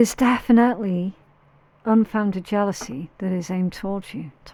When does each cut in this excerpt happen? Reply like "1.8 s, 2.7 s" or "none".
none

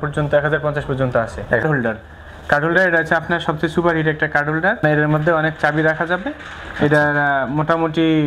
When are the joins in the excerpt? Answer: 1.6 s, 4.8 s

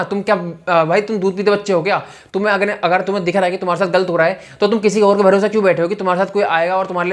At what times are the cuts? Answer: none

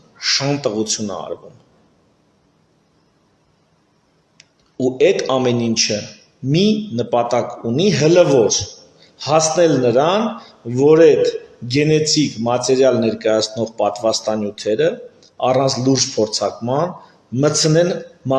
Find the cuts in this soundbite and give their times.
none

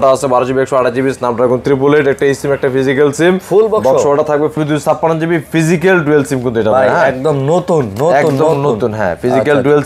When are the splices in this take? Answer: 4.5 s

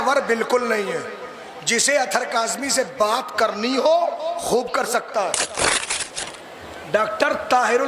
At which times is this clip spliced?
5.9 s

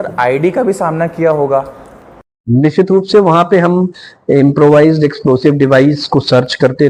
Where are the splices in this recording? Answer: none

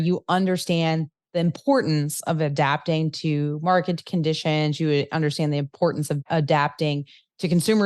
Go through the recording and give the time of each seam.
6.2 s

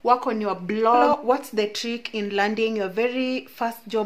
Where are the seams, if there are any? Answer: 1.1 s

